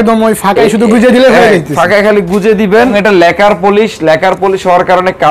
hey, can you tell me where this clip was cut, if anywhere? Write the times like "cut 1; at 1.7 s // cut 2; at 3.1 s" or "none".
cut 1; at 2.9 s